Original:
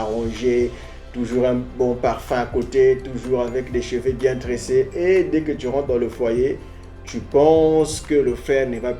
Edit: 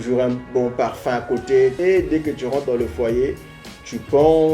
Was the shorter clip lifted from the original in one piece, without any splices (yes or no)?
no